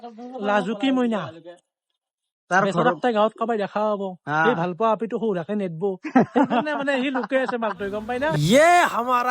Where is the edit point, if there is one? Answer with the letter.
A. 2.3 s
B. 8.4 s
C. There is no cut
B